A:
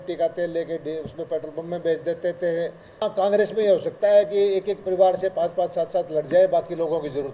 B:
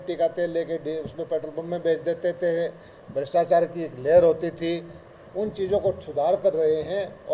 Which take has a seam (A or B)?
A